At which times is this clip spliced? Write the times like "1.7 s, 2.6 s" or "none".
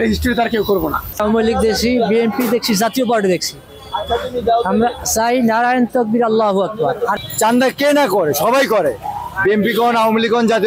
1.0 s, 7.2 s